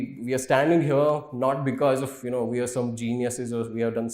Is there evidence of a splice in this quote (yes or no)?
no